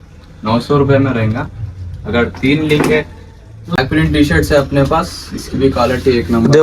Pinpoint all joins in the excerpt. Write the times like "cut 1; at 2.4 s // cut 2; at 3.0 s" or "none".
cut 1; at 3.6 s